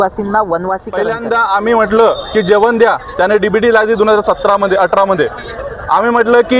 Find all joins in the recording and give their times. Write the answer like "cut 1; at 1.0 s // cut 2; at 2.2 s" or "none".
cut 1; at 1.0 s